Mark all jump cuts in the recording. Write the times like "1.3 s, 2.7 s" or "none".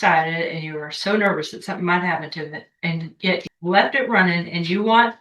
3.5 s